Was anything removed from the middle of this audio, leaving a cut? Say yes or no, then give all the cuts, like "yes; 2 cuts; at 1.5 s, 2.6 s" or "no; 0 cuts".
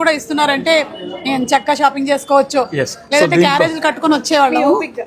no; 0 cuts